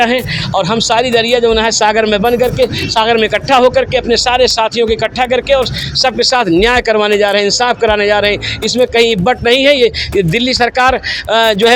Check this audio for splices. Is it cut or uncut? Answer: uncut